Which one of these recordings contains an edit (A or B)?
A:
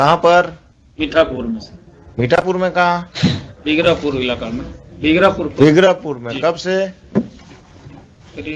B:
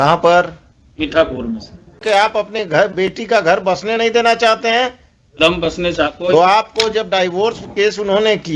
B